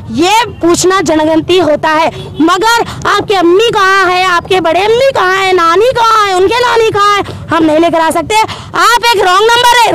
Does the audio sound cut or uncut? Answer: cut